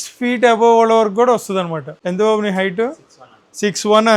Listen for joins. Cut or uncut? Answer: cut